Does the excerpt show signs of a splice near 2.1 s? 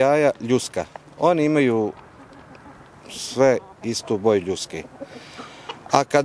no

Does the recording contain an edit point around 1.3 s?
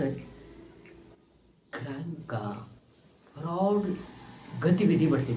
no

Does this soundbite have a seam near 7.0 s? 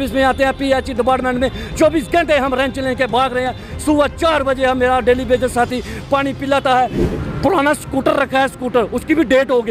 yes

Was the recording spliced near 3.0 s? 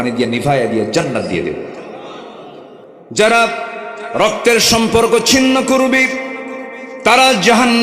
yes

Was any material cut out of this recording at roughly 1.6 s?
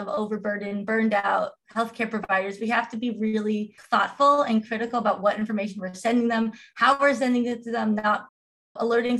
no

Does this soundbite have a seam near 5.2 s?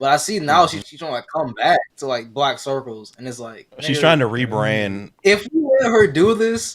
yes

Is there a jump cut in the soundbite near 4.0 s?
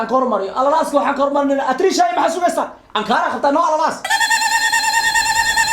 yes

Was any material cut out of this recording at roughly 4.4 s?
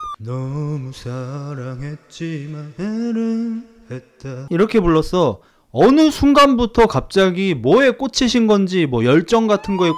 yes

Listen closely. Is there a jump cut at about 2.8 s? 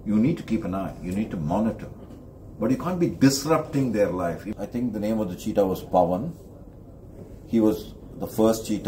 no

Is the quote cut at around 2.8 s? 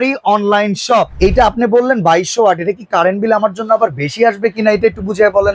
no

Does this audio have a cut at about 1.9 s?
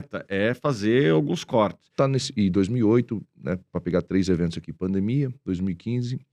yes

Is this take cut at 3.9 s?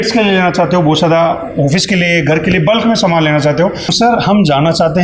yes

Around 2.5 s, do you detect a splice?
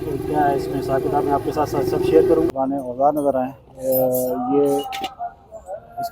yes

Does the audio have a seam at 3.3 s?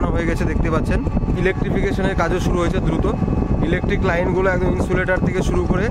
no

